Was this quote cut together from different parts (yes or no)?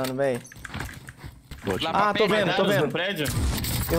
yes